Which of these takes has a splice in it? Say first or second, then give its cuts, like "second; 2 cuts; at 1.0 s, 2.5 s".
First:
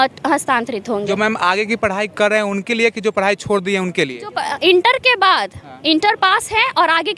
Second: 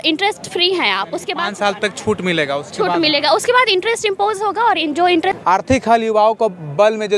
second; 1 cut; at 5.4 s